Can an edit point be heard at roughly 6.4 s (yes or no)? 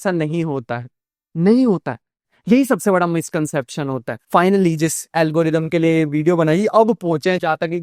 no